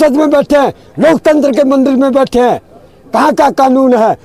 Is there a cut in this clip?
no; 0 cuts

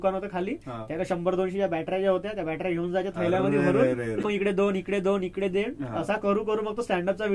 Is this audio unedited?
no; 1 cut; at 4.4 s

